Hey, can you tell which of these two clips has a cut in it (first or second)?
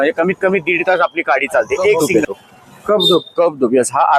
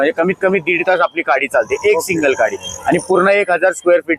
first